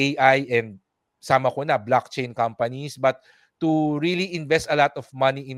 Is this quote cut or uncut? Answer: uncut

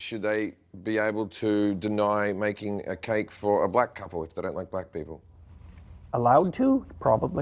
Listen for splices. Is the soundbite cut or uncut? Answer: uncut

